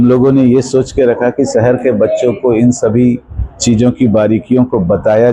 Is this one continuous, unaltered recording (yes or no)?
yes